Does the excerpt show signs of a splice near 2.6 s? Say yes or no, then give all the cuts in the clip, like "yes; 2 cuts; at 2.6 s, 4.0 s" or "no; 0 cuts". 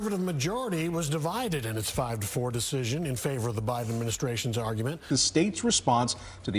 no; 1 cut; at 4.9 s